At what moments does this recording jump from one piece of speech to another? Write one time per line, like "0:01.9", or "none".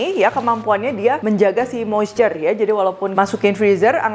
0:01.2
0:03.0